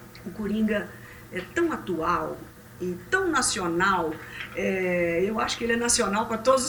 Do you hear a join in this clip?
no; 0 cuts

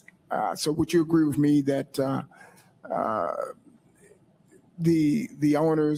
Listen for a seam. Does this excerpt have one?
no; 0 cuts

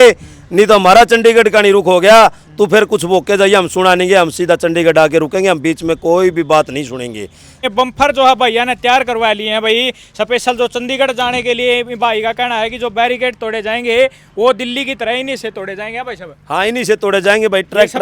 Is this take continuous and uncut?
no; 1 cut; at 7.6 s

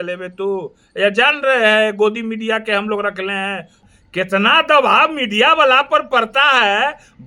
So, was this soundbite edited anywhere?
yes; 1 cut; at 3.8 s

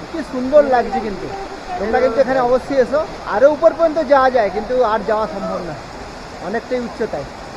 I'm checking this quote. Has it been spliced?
no; 0 cuts

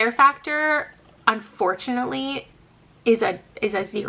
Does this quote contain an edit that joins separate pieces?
no; 0 cuts

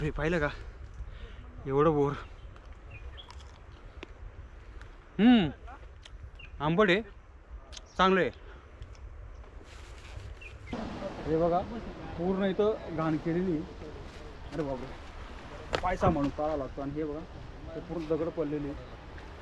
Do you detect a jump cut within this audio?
yes; 1 cut; at 10.7 s

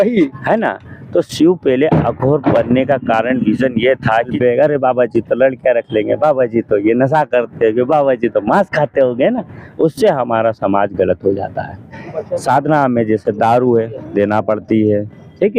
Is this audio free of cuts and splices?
no; 2 cuts; at 4.3 s, 12.0 s

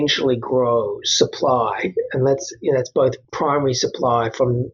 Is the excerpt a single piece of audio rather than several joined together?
no; 1 cut; at 3.3 s

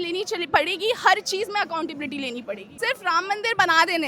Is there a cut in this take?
yes; 1 cut; at 2.7 s

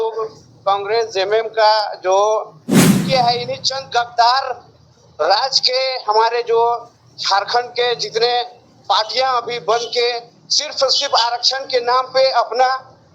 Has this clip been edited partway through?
yes; 1 cut; at 3.0 s

